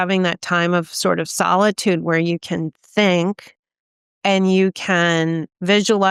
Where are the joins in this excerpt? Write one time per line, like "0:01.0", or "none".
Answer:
none